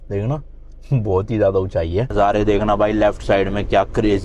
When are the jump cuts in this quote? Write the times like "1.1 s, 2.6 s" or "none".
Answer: 2.1 s